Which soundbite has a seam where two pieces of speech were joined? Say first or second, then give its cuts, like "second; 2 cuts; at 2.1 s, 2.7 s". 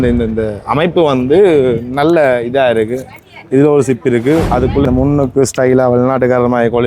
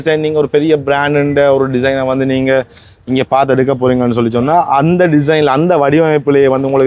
first; 1 cut; at 4.8 s